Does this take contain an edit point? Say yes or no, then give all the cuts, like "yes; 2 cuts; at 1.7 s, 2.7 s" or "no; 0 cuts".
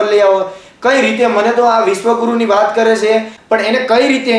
yes; 1 cut; at 3.4 s